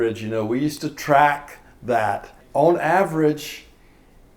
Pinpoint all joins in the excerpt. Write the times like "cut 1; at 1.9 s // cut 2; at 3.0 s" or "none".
cut 1; at 2.4 s